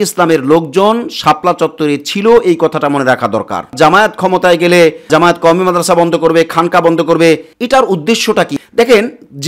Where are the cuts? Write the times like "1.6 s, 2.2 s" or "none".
3.7 s, 5.1 s, 7.5 s, 8.5 s